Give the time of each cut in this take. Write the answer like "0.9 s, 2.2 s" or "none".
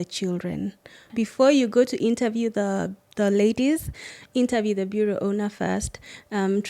1.0 s